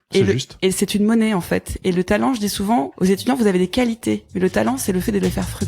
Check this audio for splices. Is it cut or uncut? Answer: cut